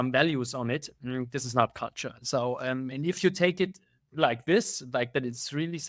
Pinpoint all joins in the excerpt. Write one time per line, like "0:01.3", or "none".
none